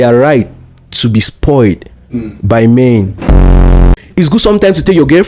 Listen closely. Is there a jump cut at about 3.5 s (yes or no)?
yes